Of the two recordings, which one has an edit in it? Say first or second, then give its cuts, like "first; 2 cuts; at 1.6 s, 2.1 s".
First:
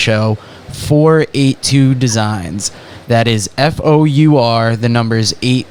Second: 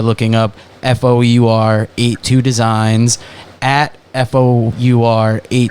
second; 1 cut; at 4.7 s